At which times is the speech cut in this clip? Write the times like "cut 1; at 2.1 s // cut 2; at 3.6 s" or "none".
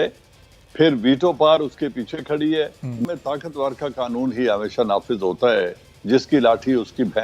cut 1; at 3.1 s